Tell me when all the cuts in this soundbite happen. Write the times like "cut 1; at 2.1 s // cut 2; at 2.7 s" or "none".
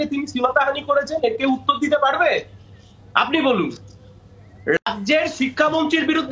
none